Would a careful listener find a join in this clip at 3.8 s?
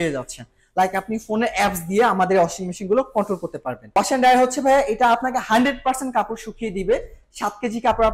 yes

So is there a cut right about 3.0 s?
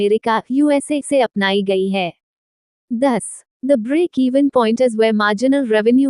yes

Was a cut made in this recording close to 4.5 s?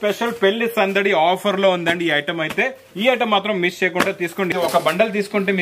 yes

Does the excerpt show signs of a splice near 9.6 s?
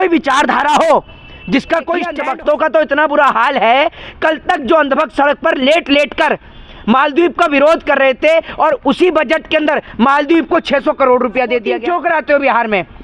no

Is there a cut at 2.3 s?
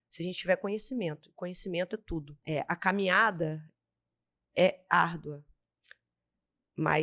yes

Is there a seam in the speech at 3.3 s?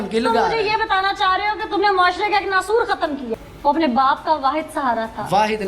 yes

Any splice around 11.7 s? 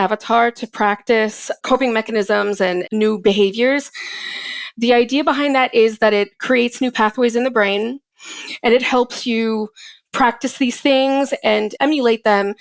yes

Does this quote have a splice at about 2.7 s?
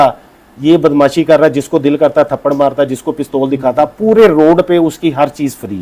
no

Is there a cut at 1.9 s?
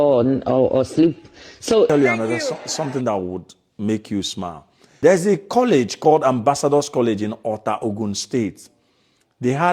yes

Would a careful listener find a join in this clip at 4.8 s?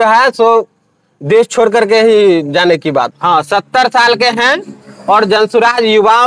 no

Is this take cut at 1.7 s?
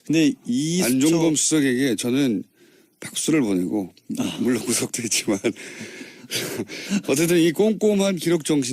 no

